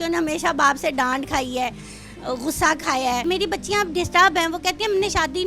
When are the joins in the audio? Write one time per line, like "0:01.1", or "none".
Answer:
0:03.2